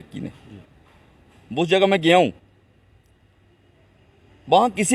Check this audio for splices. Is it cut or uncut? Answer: uncut